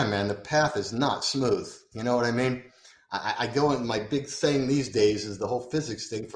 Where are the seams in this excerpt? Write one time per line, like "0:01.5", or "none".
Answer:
none